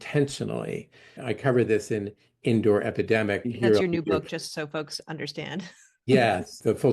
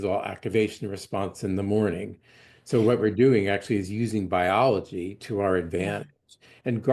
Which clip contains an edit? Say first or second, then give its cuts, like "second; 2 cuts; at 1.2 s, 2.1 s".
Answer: first; 2 cuts; at 1.2 s, 3.5 s